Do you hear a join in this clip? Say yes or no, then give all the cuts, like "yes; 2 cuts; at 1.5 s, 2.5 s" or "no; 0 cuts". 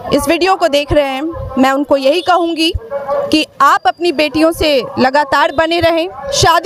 no; 0 cuts